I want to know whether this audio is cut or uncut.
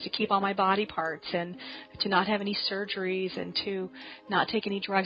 uncut